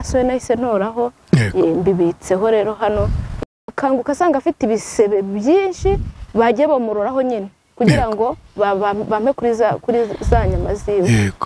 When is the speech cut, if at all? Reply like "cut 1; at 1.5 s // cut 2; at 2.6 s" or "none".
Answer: cut 1; at 3.4 s